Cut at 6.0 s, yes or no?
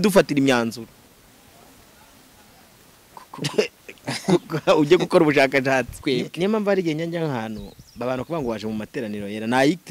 yes